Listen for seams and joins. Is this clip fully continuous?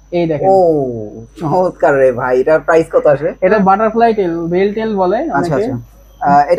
no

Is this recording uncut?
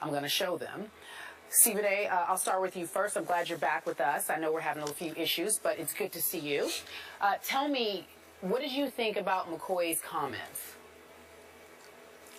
yes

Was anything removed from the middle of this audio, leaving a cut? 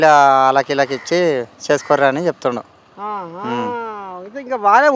no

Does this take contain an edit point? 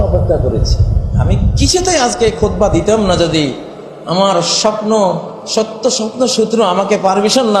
no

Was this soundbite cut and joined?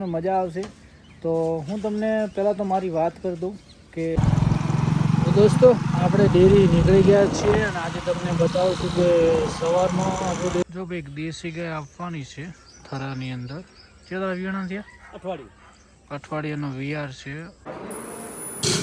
yes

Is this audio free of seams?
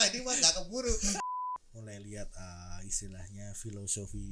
no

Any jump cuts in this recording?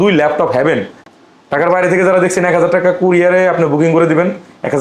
yes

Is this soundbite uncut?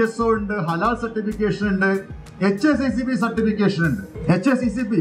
no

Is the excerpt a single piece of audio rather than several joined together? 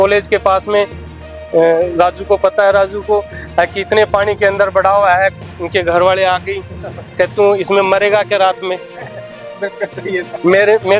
yes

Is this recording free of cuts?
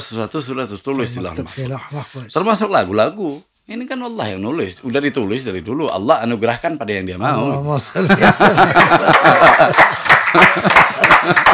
yes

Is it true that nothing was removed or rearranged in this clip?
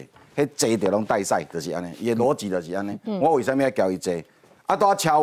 yes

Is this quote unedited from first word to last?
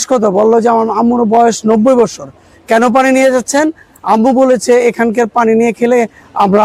yes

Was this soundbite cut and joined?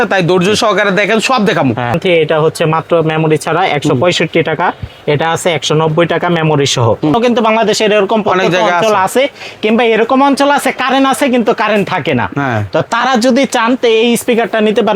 yes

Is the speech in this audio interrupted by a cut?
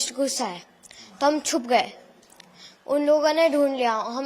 no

